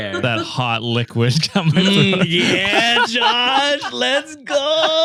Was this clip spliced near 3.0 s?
no; 0 cuts

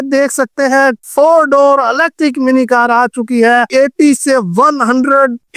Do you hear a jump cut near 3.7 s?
yes; 1 cut; at 3.7 s

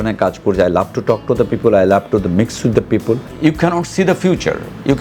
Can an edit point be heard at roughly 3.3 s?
yes; 1 cut; at 3.3 s

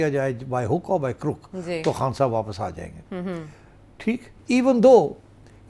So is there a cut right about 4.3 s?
yes; 1 cut; at 4.3 s

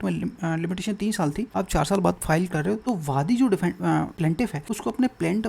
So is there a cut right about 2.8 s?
yes; 3 cuts; at 1.5 s, 2.8 s, 4.4 s

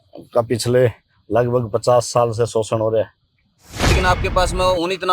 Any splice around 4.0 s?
yes; 1 cut; at 4.0 s

